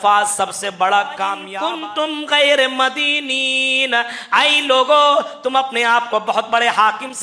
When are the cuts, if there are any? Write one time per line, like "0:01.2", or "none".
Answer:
0:01.4